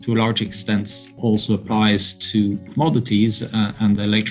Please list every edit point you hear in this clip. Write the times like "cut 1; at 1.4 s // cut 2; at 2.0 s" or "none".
cut 1; at 1.0 s // cut 2; at 2.7 s